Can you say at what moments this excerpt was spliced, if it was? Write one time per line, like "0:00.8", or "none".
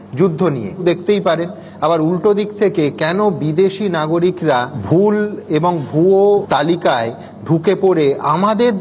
0:00.8
0:04.8
0:06.5